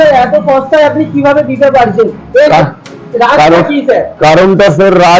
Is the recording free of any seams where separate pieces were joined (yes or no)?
yes